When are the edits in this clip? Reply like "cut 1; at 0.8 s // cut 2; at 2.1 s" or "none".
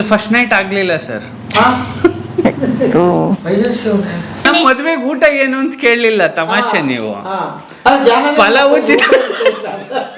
cut 1; at 4.5 s